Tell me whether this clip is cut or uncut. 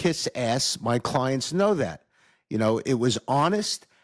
uncut